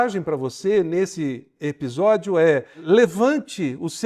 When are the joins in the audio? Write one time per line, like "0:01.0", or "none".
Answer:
0:02.8